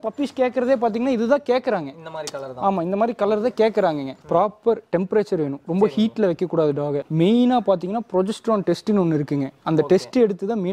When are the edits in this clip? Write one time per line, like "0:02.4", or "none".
0:04.2
0:07.0
0:09.5